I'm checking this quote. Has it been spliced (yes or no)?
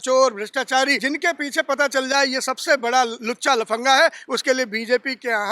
yes